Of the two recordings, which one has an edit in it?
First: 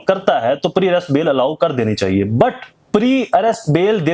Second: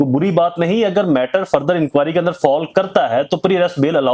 first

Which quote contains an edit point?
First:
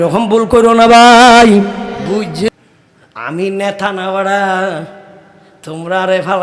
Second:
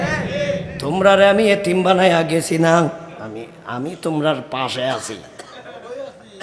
first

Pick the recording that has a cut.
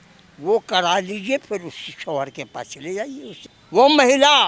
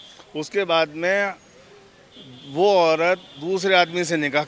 first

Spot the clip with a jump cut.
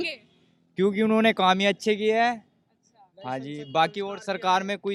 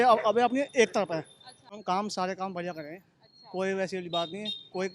second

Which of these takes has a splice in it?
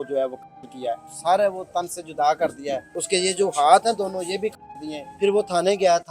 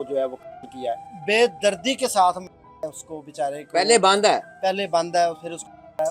first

